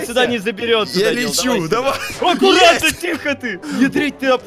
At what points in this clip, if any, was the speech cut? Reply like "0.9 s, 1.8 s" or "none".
3.5 s